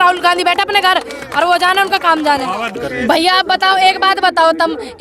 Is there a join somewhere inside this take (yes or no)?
yes